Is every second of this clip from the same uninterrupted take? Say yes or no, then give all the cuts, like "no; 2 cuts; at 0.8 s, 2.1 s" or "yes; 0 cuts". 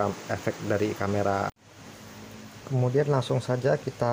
no; 1 cut; at 1.6 s